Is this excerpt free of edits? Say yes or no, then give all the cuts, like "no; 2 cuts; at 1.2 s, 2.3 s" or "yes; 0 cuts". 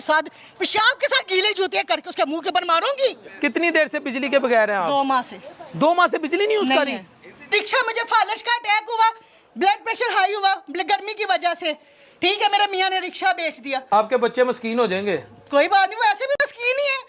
no; 3 cuts; at 3.3 s, 7.5 s, 13.9 s